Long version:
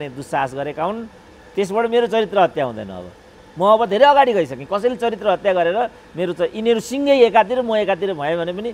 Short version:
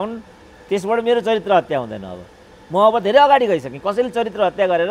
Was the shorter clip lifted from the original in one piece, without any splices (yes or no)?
yes